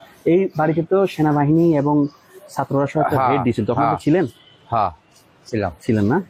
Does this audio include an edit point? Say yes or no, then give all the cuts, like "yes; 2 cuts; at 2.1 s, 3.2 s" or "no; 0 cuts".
no; 0 cuts